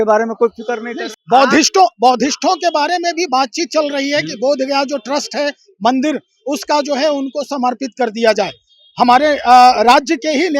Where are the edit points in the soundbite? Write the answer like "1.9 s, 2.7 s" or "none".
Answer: 1.0 s

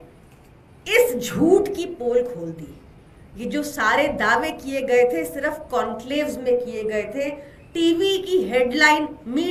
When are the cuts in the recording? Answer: none

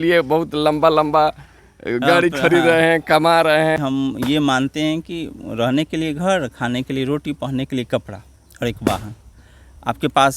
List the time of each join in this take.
3.8 s

